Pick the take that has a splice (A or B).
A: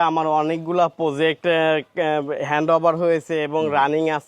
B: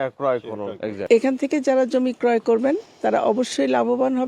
B